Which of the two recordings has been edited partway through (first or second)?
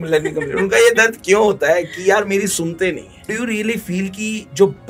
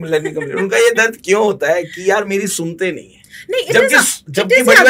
first